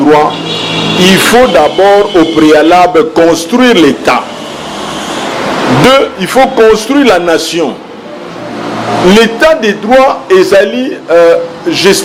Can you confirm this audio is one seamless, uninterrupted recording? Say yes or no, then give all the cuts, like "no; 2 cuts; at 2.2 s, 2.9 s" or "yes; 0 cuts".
yes; 0 cuts